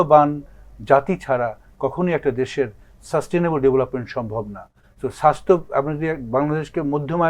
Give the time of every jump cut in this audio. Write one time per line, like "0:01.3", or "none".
none